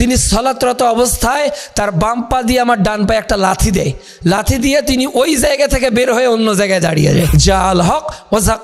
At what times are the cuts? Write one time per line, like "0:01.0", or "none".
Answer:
0:07.3